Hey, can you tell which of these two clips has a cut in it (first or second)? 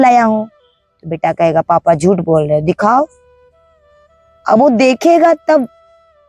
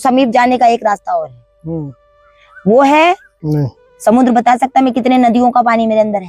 second